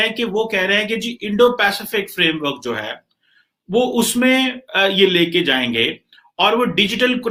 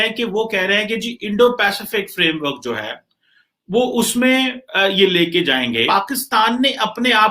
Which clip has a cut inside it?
second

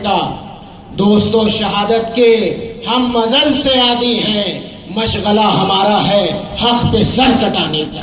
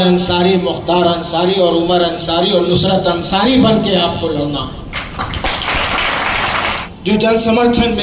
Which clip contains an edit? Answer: second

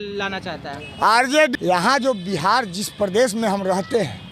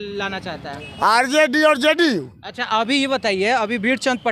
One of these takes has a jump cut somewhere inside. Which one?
first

